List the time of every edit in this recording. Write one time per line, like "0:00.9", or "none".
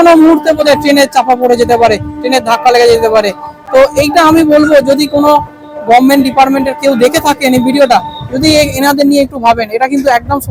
none